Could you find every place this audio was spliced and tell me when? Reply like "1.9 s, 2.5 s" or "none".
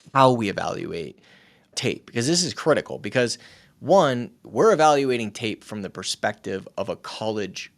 1.7 s, 4.3 s

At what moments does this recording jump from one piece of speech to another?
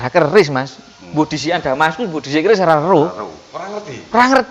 none

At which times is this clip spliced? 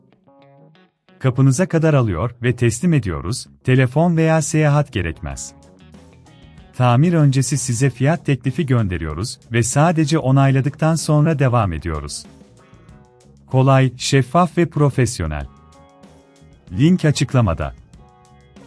17.8 s

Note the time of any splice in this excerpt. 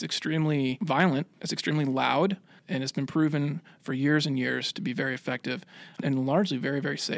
1.1 s, 2.5 s, 6.0 s

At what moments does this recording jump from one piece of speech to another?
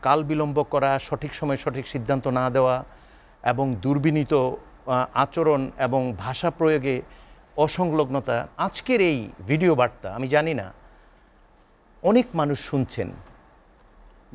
8.5 s

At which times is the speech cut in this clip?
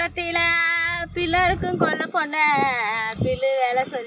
none

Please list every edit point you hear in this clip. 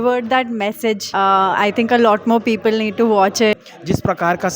1.0 s, 3.6 s

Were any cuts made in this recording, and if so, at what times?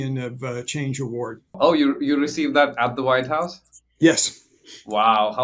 1.6 s

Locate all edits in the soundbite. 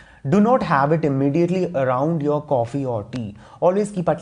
none

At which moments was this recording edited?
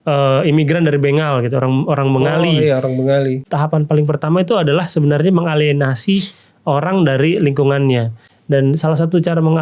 3.4 s

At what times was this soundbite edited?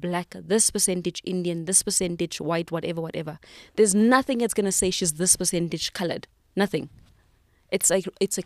none

